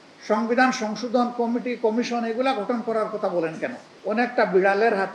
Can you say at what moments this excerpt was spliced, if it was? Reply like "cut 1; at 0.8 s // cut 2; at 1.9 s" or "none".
cut 1; at 3.9 s